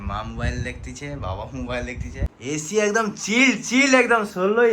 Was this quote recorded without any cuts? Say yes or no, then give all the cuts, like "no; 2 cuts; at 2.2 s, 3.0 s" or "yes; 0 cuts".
no; 1 cut; at 2.3 s